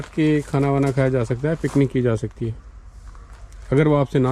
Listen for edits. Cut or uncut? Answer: uncut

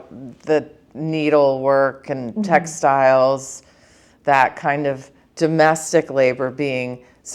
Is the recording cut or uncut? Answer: uncut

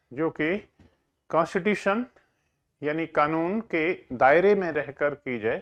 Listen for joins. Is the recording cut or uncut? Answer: uncut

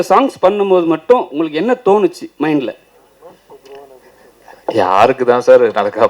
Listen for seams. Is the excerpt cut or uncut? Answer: uncut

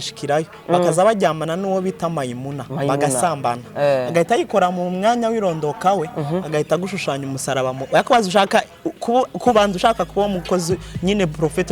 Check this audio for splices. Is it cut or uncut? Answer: uncut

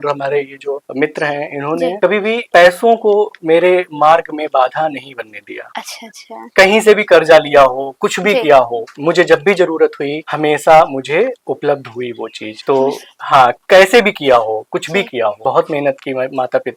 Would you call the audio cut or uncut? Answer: uncut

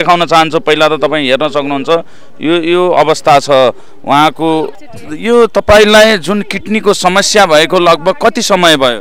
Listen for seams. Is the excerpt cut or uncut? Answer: cut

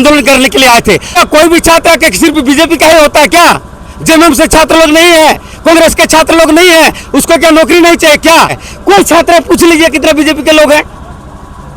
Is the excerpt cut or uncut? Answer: cut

